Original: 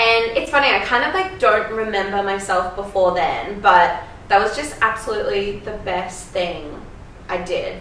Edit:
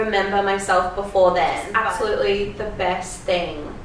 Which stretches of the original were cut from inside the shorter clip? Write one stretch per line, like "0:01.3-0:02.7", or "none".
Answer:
0:03.5-0:04.7